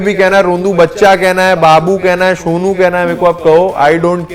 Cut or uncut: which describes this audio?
uncut